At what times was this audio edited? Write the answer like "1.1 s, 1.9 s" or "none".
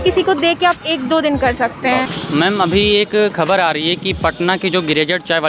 2.2 s